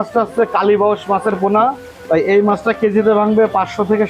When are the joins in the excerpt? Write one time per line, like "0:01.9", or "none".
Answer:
0:01.9